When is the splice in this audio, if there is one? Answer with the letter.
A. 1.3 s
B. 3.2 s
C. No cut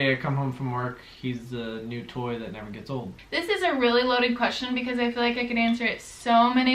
B